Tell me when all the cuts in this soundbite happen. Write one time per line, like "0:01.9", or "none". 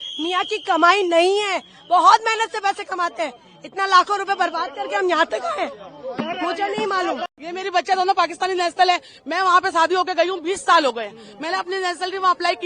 none